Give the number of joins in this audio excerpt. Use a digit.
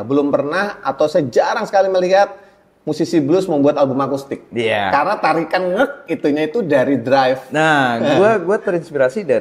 0